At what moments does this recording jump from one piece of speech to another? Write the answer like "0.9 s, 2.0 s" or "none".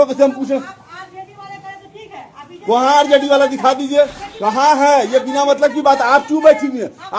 4.2 s